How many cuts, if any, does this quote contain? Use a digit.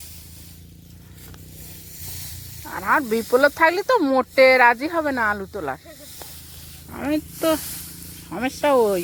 0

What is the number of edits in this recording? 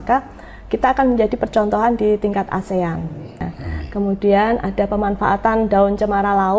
1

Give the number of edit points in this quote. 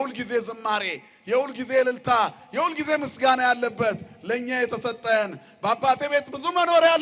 0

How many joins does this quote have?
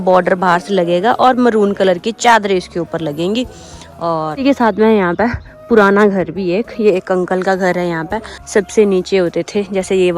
0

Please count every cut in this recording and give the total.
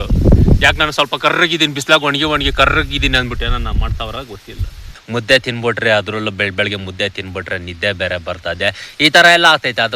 1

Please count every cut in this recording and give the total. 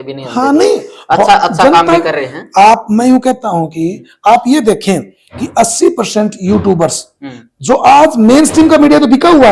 0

